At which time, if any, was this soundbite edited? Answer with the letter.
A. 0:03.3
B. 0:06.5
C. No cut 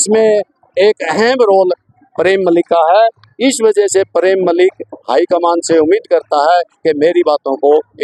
C